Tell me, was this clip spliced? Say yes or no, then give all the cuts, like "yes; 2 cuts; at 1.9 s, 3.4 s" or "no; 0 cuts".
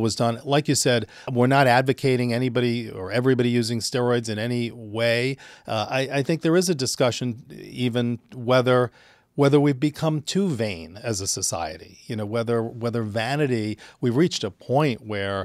yes; 1 cut; at 1.2 s